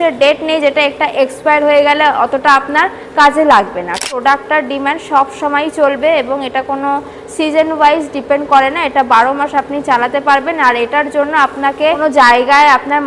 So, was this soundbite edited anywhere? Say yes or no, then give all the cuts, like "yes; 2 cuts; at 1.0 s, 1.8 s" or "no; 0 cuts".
yes; 2 cuts; at 3.9 s, 12.0 s